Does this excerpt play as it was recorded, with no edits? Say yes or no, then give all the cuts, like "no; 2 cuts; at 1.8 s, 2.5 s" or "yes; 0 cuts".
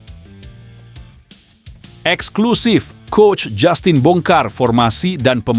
no; 1 cut; at 2.0 s